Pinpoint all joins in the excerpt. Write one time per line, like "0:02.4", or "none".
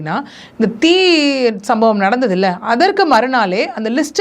none